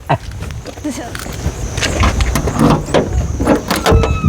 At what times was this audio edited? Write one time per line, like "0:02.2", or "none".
0:00.9